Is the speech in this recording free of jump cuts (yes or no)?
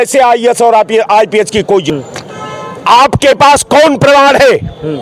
no